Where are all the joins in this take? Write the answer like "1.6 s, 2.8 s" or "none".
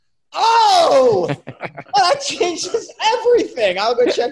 none